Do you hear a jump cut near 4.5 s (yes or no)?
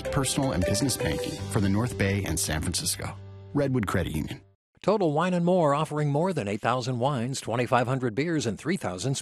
yes